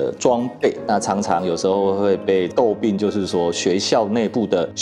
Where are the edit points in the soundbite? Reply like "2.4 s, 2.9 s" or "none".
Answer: 0.8 s, 2.5 s